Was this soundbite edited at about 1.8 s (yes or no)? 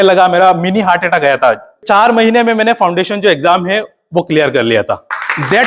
yes